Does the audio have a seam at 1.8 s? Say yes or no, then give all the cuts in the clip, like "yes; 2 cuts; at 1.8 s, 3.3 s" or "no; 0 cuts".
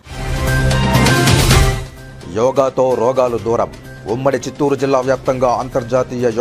yes; 1 cut; at 1.8 s